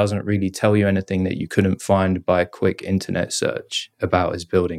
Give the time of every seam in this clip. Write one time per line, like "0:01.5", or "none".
none